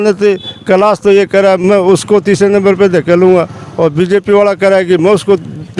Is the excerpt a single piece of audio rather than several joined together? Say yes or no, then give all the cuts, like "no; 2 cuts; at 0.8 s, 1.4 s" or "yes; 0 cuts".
yes; 0 cuts